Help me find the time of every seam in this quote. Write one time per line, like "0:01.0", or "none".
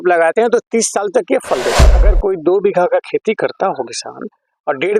0:02.0